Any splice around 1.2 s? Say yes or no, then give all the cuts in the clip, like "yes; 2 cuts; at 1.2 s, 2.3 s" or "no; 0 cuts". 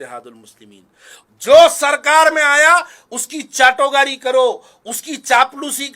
yes; 1 cut; at 1.2 s